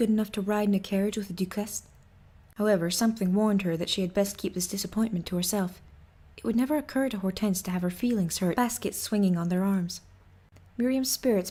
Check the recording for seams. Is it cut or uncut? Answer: uncut